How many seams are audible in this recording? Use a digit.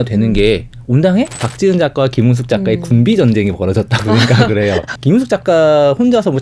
2